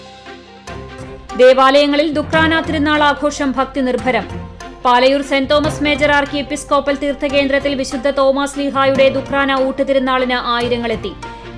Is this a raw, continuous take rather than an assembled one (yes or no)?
no